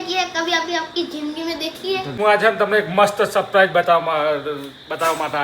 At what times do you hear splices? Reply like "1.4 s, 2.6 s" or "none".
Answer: 2.1 s

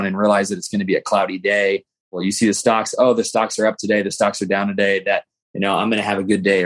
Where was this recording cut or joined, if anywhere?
2.2 s

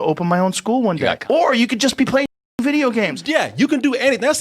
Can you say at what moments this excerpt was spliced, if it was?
3.2 s

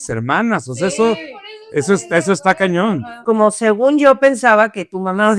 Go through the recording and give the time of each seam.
3.2 s

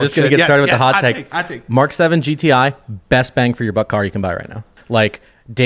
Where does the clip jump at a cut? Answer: 4.7 s

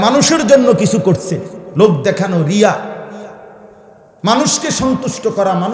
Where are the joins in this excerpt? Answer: none

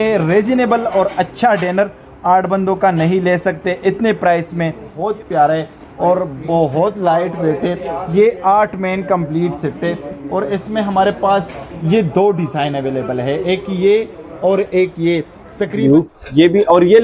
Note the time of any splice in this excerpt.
5.0 s, 15.8 s

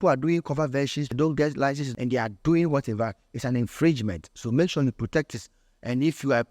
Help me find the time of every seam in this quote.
1.0 s, 1.9 s

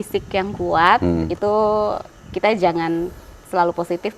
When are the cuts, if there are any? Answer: none

